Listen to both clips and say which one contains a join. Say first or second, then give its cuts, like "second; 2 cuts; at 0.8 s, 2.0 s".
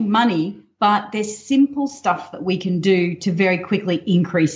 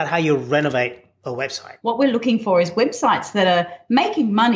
second; 1 cut; at 1.7 s